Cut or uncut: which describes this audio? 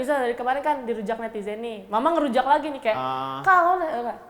uncut